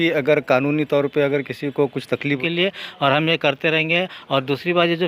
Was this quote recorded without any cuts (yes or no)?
no